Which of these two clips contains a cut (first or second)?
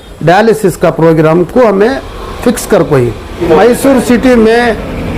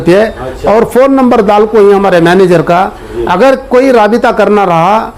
first